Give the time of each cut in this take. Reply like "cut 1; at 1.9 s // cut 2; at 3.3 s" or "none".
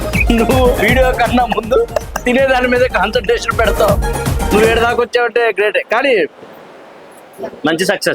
none